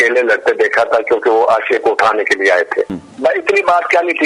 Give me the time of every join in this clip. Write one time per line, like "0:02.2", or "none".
0:03.0